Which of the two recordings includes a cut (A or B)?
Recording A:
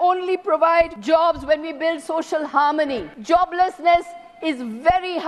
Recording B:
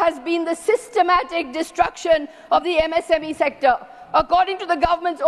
A